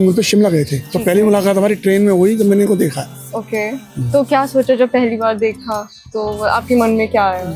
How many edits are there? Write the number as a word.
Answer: zero